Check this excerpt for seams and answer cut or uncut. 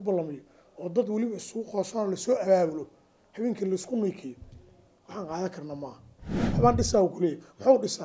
cut